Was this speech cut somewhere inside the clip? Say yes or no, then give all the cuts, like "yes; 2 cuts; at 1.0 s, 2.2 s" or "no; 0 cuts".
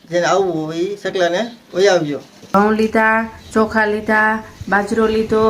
yes; 1 cut; at 2.5 s